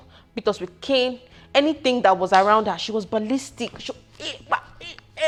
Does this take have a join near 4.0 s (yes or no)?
no